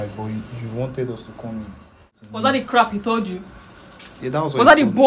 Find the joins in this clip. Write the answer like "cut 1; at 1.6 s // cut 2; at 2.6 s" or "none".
cut 1; at 2.2 s